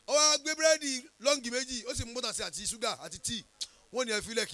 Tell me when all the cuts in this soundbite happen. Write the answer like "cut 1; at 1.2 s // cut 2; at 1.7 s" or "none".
none